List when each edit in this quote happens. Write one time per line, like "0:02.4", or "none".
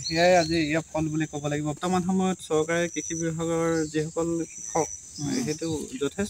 0:01.8